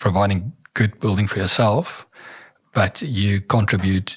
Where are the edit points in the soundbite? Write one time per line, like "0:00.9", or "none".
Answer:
none